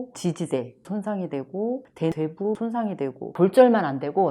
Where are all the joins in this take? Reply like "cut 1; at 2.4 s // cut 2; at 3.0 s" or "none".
cut 1; at 3.3 s